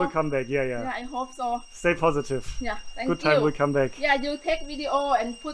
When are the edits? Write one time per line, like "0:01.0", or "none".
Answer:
none

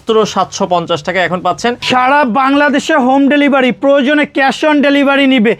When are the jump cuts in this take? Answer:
0:01.8

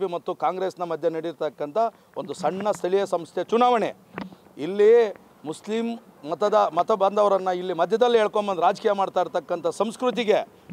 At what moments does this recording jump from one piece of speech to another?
none

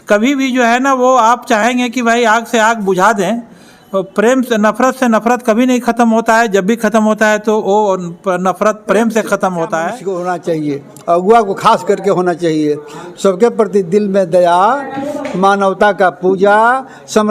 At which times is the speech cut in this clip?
0:10.0

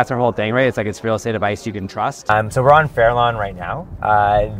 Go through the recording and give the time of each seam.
0:02.3

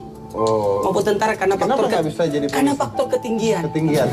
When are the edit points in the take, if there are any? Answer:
none

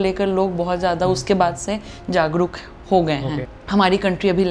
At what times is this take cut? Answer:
0:03.5

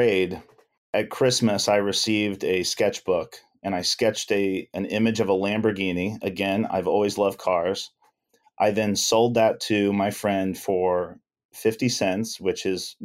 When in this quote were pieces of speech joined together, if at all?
0:00.9

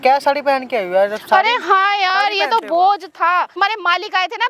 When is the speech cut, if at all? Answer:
0:03.5

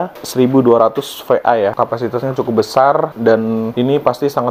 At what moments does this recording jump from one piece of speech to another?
0:03.4

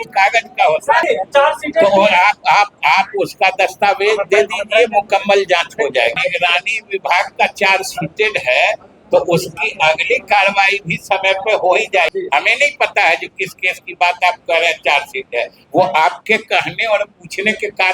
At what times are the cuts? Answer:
0:01.0
0:06.2
0:12.1

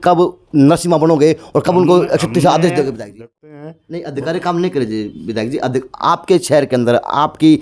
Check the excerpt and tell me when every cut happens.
0:03.2

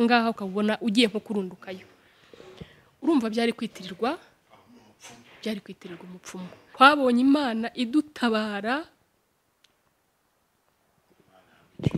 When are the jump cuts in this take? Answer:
0:06.6

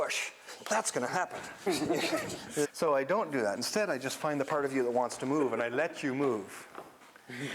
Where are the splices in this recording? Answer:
0:01.7
0:02.7

